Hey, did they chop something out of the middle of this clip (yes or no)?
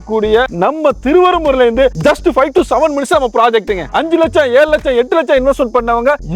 yes